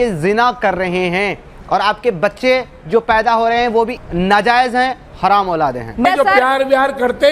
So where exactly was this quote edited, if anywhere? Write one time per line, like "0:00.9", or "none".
0:04.0
0:06.0